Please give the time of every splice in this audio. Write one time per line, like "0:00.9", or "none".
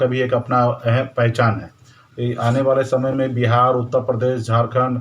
0:01.9